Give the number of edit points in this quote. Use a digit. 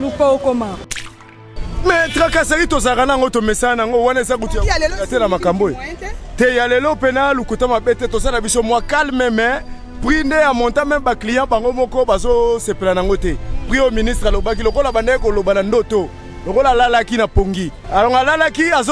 2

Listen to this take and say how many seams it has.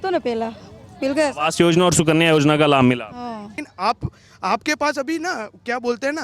1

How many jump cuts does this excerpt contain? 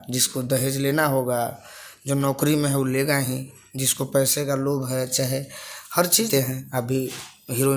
1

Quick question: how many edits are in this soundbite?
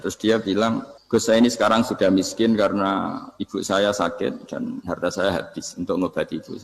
1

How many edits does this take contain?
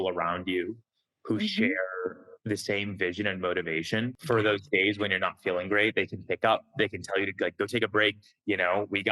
1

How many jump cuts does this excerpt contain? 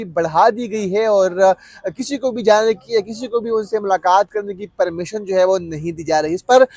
0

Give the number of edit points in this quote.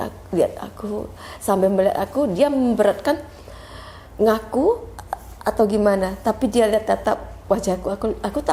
0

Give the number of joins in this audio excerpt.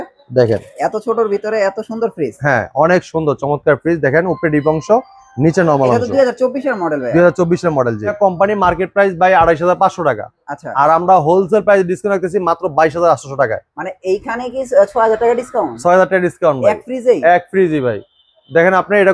0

